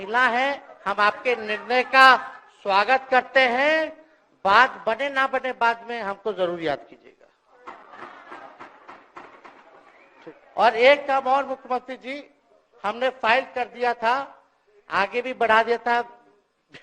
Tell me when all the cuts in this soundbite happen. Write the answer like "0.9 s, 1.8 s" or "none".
none